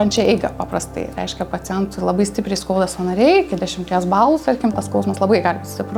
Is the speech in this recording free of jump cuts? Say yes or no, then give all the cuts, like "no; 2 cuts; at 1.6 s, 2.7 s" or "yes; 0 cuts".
yes; 0 cuts